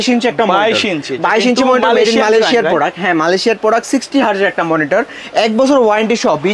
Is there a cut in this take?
no; 0 cuts

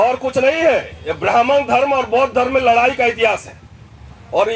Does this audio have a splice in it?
no; 0 cuts

